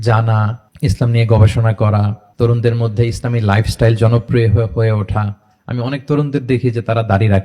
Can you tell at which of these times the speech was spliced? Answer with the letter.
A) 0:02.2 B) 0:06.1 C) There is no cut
C